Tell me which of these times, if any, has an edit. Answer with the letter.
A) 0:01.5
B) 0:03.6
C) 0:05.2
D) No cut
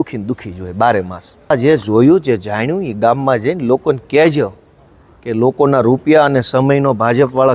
A